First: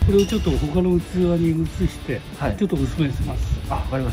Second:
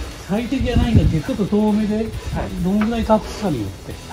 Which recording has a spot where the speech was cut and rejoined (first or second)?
second